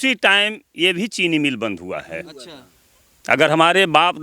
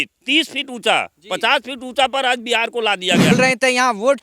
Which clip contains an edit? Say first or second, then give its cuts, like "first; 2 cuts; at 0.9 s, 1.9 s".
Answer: second; 1 cut; at 3.3 s